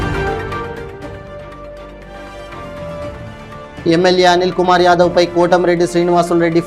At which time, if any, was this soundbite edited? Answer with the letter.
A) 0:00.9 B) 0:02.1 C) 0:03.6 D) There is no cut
B